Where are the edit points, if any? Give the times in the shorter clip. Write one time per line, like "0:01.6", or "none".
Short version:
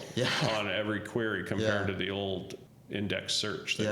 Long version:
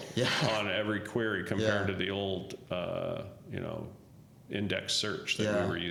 0:02.6